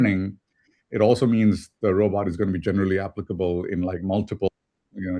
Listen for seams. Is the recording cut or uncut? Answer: uncut